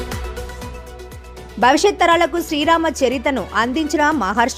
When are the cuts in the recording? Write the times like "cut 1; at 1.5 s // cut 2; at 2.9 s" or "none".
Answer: cut 1; at 0.9 s